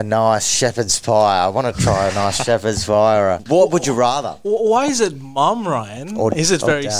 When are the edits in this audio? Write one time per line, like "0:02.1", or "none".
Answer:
0:03.4